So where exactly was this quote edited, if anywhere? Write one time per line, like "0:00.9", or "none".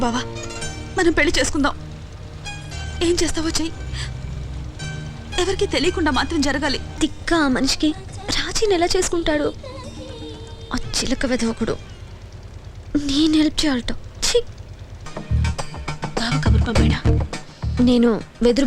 0:06.9
0:15.1

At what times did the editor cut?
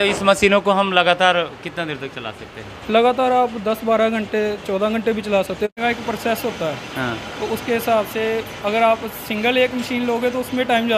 0:05.7

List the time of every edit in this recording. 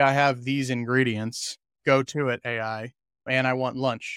0:03.3

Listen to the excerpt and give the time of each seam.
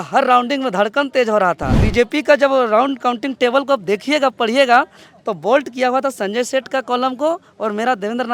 0:01.9

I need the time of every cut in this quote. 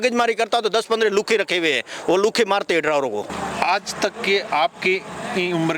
0:03.3

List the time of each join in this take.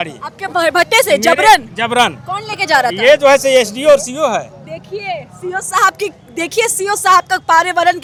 none

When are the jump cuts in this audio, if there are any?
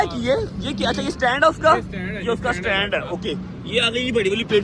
none

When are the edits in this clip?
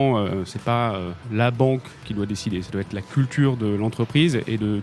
0:01.1

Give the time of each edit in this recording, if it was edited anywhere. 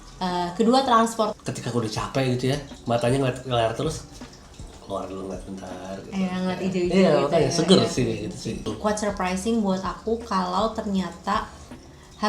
0:01.3
0:08.7

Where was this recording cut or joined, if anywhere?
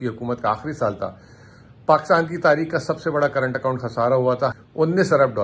0:04.5

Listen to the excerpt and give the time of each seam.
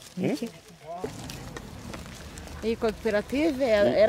0:01.0

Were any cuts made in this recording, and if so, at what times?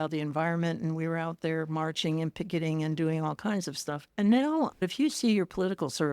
0:04.0
0:04.7

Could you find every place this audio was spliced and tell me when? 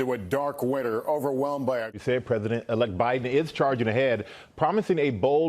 0:01.9

